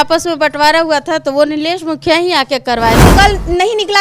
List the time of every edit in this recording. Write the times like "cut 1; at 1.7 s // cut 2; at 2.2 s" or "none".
cut 1; at 3.0 s